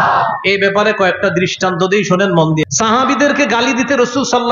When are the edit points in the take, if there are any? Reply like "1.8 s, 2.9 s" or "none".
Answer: 2.6 s